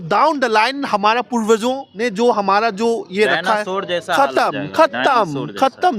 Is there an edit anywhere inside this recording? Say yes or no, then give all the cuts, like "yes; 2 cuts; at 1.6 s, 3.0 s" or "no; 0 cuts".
yes; 1 cut; at 1.9 s